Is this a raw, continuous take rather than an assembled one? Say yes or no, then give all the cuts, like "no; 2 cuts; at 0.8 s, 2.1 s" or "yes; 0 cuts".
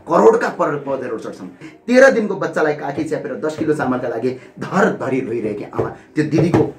no; 1 cut; at 1.7 s